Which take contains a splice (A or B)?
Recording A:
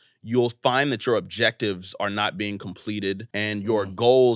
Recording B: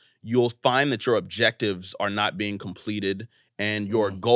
A